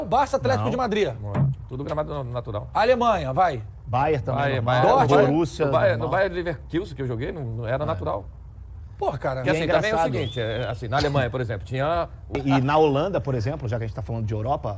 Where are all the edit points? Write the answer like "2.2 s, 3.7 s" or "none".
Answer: 12.3 s